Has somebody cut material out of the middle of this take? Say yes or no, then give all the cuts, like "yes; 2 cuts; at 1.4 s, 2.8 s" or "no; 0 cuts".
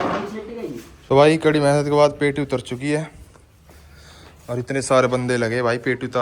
yes; 1 cut; at 0.9 s